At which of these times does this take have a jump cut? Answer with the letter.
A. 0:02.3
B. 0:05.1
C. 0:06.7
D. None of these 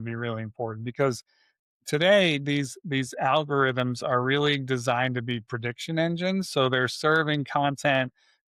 D